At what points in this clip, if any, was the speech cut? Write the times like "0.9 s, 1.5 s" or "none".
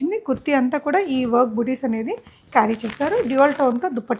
none